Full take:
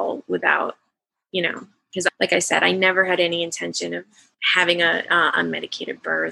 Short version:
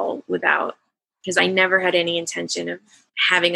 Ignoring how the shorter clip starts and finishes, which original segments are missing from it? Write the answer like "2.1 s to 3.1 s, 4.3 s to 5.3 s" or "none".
1.4 s to 2.6 s

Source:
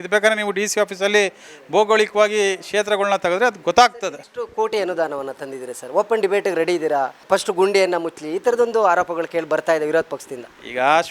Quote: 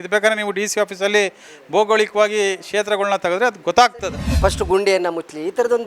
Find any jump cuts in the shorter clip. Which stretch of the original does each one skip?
4.3 s to 7.2 s

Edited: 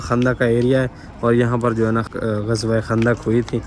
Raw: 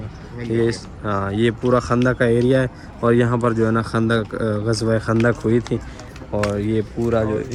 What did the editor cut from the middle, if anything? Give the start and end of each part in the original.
3.9 s to 4.3 s

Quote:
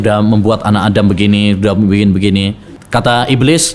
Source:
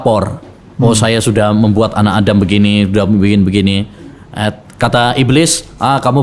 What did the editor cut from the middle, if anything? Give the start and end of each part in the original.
4.1 s to 4.6 s

